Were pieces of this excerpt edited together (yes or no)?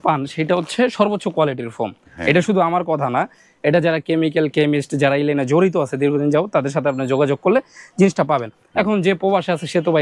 no